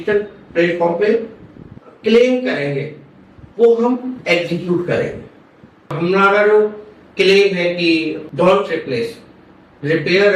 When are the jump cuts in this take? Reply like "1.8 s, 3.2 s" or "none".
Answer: 5.9 s, 8.2 s